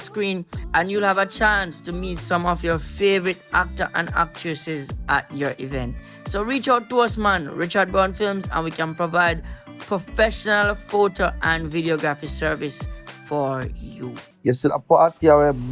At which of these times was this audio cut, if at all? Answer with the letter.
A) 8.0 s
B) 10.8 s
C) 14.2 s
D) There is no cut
C